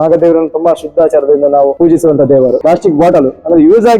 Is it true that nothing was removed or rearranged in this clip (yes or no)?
no